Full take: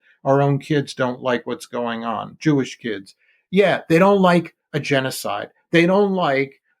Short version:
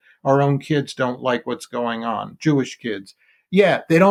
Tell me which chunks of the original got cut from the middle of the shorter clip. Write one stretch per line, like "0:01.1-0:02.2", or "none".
none